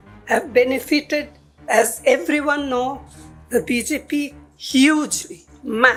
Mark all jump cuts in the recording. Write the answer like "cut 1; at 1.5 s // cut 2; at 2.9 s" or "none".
none